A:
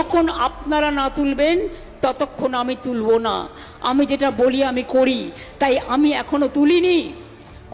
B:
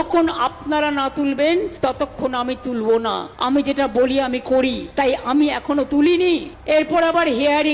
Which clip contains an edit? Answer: B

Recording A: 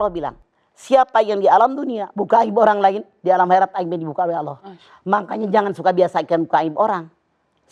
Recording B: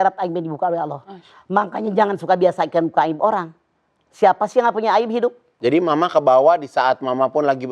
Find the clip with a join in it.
B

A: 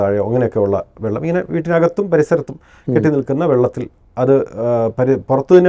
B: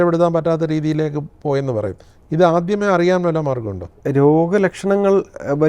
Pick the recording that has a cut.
B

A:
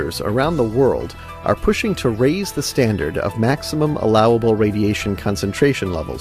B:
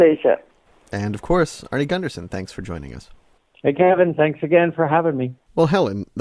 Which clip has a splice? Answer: A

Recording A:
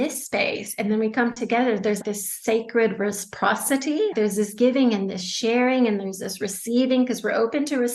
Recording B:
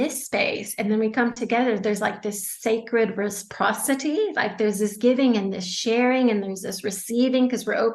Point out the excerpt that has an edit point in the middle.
A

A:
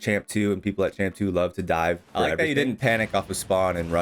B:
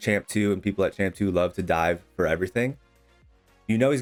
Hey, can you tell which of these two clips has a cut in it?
A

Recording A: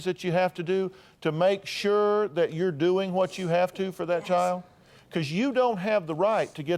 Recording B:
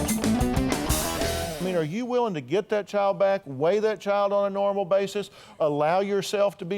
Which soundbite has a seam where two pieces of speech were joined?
B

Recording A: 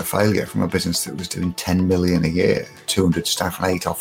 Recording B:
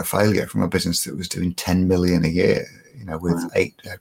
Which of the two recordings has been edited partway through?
A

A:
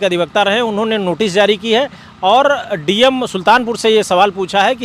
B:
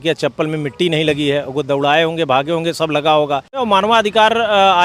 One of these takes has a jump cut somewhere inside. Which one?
B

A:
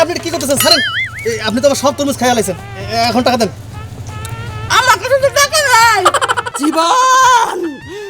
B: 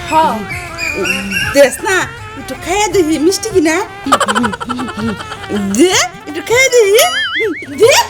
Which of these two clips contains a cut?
A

